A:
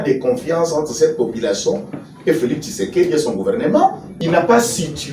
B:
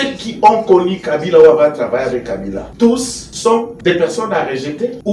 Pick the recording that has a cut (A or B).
A